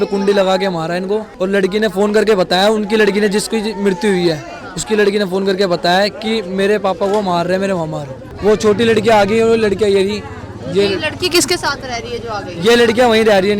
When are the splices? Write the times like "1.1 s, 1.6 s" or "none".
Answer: none